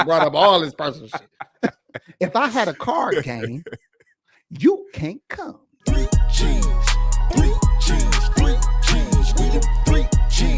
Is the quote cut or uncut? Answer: cut